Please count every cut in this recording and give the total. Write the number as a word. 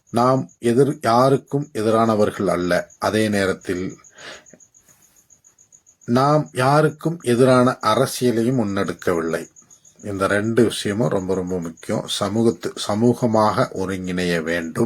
zero